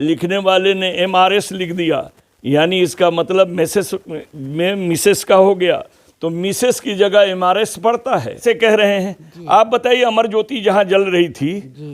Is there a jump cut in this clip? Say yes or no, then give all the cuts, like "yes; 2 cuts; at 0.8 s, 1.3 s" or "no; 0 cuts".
yes; 1 cut; at 8.4 s